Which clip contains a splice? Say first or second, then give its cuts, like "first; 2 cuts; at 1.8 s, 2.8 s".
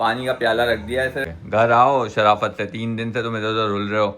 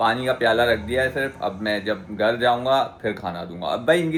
first; 1 cut; at 1.3 s